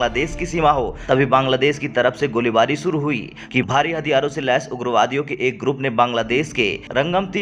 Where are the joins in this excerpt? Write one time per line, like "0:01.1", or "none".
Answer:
0:01.0
0:03.4